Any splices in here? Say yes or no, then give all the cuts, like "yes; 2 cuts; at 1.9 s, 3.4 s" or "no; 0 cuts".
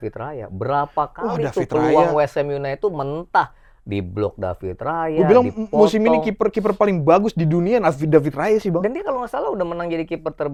no; 0 cuts